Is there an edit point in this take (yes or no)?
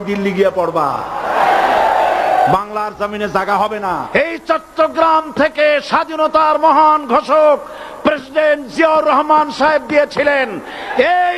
yes